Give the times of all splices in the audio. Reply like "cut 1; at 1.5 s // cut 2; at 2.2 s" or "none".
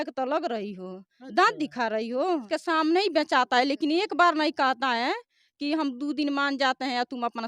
cut 1; at 2.4 s